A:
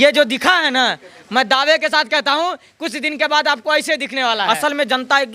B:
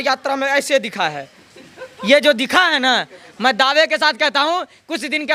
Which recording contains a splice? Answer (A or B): A